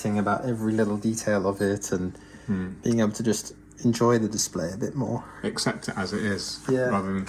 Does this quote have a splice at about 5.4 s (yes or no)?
no